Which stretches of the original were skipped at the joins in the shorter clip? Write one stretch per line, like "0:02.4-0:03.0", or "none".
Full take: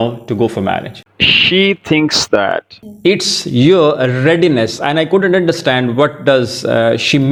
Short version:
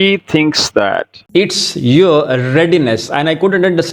0:02.7-0:02.8